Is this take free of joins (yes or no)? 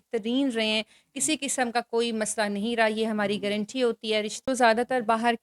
no